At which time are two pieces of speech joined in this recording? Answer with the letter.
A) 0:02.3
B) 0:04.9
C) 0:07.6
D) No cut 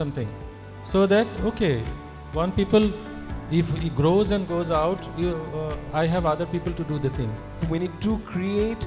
C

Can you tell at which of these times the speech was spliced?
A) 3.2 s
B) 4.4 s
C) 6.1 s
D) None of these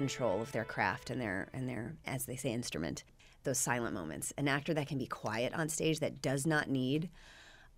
A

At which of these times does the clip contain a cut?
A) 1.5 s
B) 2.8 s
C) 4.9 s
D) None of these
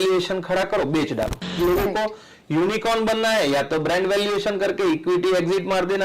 A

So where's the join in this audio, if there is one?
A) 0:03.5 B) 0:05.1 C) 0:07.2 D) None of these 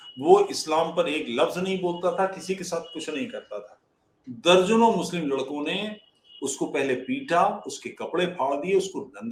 D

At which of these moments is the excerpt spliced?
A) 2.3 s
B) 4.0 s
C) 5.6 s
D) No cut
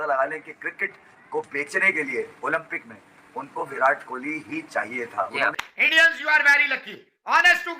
C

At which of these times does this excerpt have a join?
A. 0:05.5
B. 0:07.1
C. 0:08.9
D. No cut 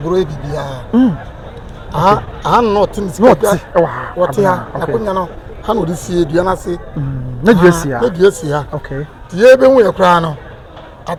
D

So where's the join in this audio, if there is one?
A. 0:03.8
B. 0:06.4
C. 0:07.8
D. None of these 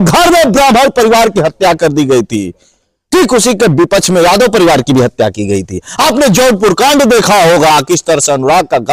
D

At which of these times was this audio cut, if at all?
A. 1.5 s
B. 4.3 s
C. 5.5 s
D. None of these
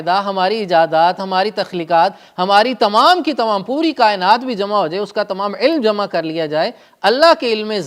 D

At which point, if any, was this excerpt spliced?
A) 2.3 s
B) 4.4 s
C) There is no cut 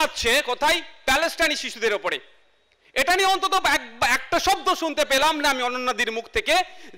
C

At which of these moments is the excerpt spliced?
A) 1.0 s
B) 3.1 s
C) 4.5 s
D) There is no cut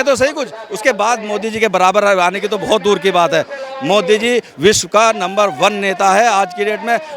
D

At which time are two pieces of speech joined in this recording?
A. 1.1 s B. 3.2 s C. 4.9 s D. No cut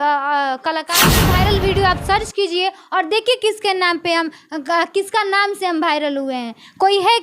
A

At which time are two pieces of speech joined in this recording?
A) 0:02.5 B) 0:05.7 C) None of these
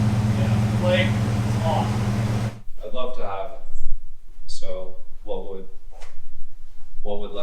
A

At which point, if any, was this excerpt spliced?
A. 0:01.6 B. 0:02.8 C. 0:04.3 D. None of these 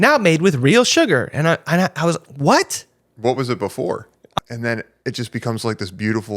C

